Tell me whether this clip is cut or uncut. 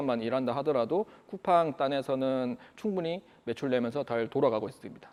uncut